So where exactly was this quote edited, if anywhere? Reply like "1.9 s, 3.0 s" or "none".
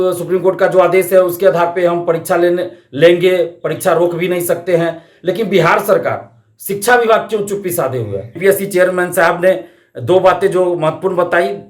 8.3 s